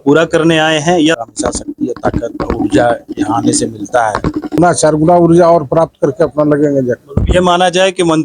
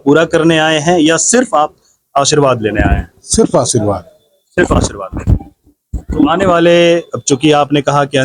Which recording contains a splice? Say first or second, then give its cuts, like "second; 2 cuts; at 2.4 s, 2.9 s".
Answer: first; 2 cuts; at 1.2 s, 4.6 s